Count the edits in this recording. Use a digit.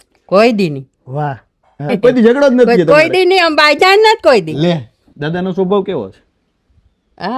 2